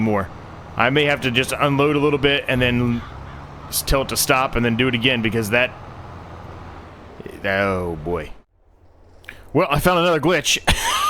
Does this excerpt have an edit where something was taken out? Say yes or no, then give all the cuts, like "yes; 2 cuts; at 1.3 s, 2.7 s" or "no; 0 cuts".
yes; 1 cut; at 8.4 s